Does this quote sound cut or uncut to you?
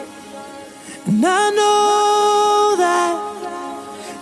cut